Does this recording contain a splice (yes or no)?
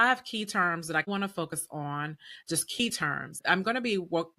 yes